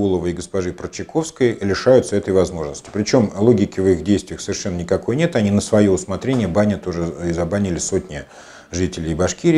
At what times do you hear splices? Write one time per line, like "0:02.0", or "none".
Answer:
none